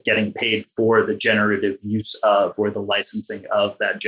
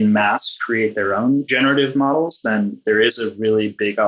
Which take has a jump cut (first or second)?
second